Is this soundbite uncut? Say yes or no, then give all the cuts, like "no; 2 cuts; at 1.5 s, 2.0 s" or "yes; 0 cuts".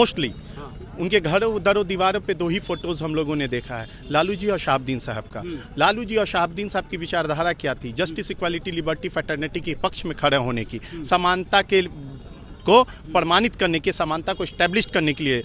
yes; 0 cuts